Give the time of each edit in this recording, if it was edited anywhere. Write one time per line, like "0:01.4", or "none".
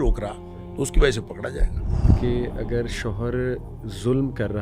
0:02.1